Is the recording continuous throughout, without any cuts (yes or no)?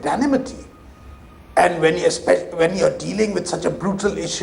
no